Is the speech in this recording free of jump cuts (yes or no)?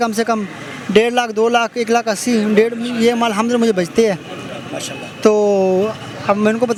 yes